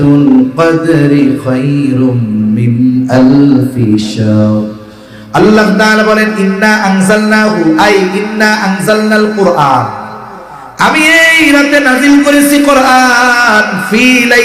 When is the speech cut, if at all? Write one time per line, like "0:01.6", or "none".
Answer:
none